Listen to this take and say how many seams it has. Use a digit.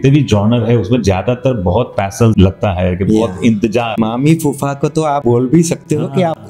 3